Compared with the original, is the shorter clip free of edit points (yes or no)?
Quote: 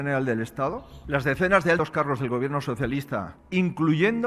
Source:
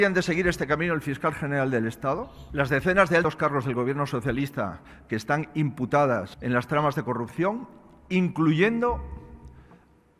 no